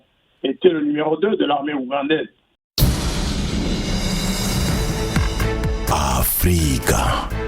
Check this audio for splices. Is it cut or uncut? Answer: cut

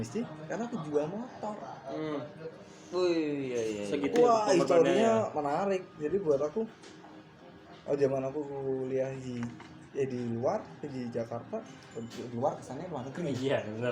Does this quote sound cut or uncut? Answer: uncut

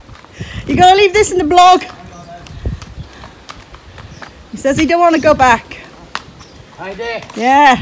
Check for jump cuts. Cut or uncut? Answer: uncut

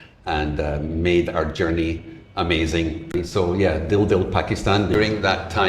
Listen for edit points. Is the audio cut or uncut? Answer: cut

